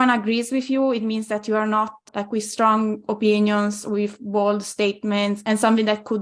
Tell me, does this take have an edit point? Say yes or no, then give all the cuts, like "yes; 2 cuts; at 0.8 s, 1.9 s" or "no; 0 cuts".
yes; 2 cuts; at 2.1 s, 5.4 s